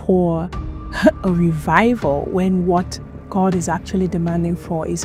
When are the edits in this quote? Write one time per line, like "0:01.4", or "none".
none